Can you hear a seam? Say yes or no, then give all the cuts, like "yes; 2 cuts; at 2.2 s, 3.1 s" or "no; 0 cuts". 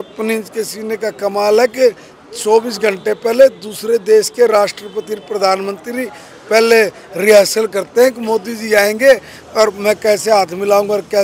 no; 0 cuts